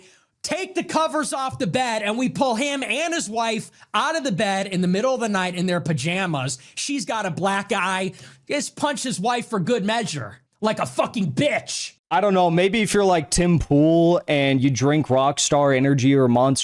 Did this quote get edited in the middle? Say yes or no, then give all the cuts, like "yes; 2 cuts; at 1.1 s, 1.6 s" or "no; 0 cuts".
no; 0 cuts